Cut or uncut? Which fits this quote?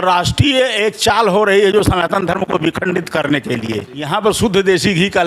cut